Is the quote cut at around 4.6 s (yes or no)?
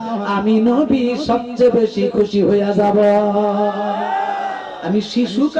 yes